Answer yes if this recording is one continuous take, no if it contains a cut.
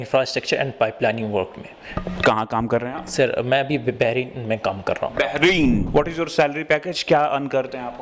no